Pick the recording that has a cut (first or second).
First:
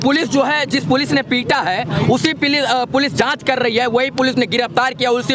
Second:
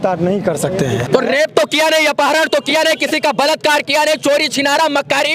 second